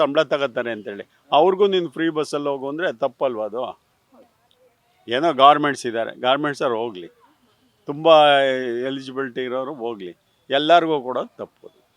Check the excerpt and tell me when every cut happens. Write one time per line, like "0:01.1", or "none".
none